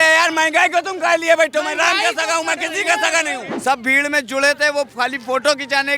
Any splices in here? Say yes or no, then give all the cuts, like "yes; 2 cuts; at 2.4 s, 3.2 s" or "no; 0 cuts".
yes; 1 cut; at 3.5 s